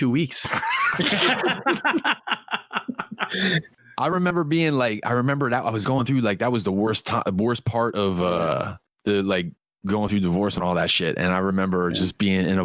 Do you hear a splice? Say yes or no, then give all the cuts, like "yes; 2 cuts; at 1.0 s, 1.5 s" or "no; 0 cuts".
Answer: no; 0 cuts